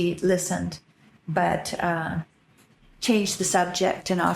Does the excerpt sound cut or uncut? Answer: uncut